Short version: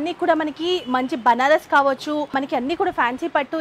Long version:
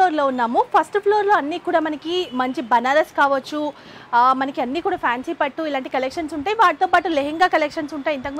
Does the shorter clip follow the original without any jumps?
no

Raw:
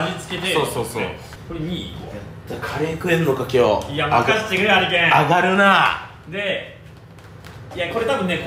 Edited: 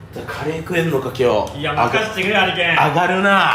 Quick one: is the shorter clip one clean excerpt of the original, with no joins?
yes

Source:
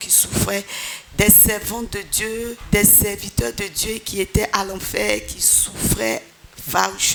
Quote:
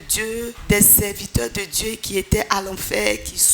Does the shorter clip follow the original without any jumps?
yes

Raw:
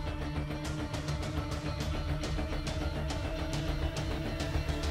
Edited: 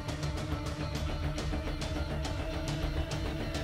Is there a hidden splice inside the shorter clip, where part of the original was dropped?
no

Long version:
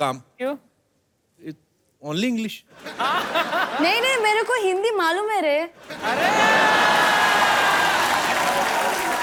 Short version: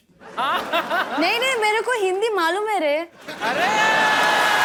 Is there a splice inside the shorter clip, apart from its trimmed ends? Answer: no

